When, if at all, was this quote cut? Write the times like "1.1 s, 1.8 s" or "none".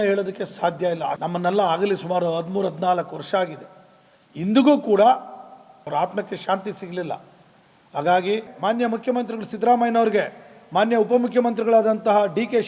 1.2 s, 5.9 s, 8.5 s